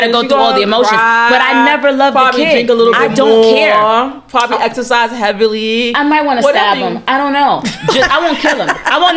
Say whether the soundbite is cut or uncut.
uncut